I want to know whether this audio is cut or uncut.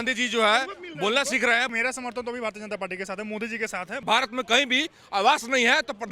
cut